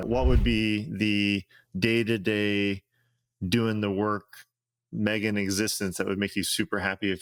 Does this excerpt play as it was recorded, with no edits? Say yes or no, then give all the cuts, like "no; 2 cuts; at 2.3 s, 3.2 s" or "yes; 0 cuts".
yes; 0 cuts